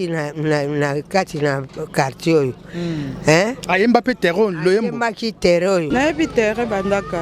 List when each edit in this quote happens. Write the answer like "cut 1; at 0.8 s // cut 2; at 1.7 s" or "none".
cut 1; at 5.9 s